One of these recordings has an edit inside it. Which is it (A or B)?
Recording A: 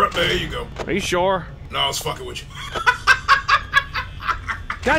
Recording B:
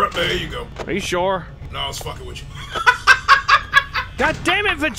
B